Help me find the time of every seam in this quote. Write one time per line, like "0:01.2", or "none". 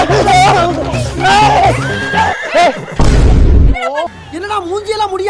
0:02.3